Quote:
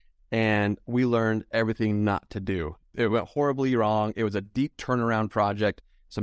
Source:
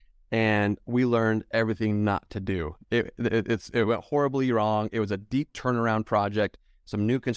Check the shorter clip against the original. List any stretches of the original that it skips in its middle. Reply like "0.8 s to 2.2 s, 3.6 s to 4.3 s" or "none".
2.9 s to 3.6 s